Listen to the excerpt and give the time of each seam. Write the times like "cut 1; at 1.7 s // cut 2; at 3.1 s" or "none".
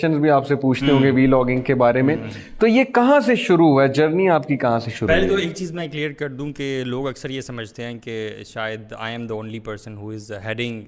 none